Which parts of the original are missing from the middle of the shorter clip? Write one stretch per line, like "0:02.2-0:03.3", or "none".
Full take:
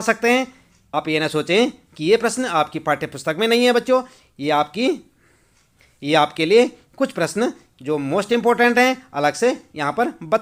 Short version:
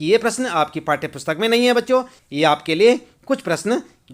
0:04.2-0:05.9